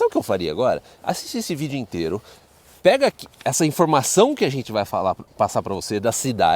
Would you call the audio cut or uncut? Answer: uncut